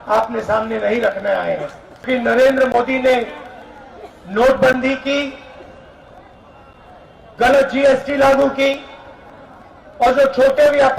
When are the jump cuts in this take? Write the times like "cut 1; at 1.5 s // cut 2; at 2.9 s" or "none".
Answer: cut 1; at 1.9 s